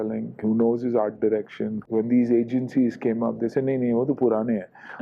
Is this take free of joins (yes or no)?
no